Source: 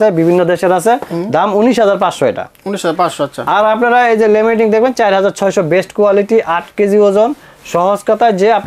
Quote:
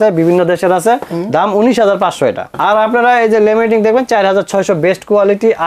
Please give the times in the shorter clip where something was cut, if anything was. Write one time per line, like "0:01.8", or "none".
0:02.5

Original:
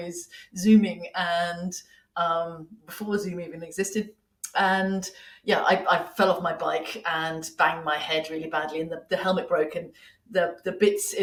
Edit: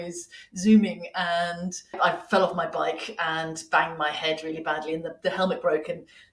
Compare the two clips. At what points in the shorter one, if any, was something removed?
0:01.9

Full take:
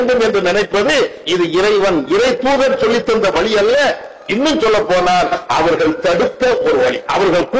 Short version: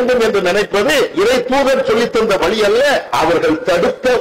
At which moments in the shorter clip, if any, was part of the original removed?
0:01.1
0:03.1

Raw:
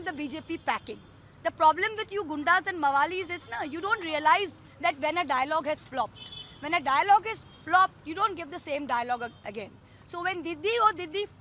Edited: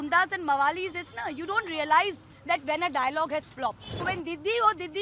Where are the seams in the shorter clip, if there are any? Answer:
0:03.9

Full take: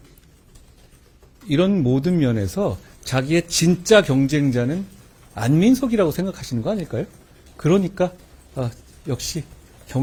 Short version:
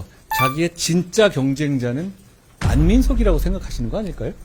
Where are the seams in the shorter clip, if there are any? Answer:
none

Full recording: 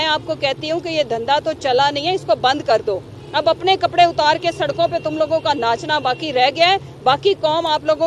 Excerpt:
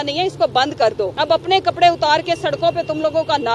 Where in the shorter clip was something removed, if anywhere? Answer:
0:01.1

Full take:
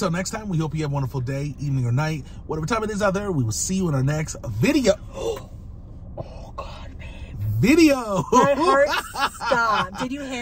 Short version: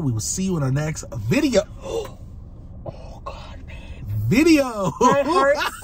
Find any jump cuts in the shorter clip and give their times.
none

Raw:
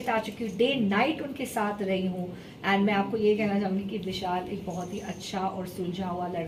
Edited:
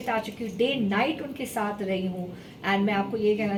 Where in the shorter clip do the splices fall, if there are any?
none

